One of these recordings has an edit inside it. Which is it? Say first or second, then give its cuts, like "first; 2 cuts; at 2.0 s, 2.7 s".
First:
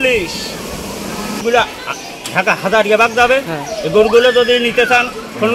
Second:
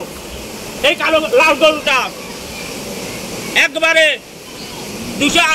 first; 1 cut; at 1.4 s